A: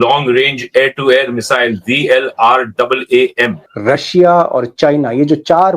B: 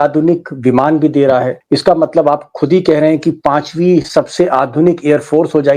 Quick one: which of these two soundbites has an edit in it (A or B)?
A